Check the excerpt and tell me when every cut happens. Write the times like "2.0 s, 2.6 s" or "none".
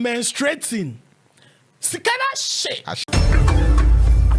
3.0 s